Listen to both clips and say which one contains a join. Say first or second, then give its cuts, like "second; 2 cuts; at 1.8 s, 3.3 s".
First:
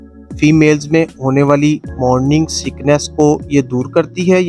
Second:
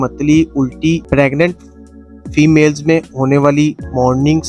second; 1 cut; at 1.0 s